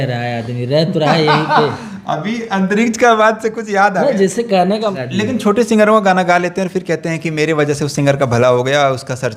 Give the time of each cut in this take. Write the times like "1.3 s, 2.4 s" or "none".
5.0 s